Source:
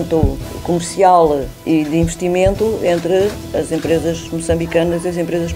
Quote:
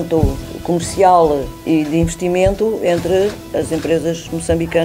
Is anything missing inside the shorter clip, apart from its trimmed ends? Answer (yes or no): no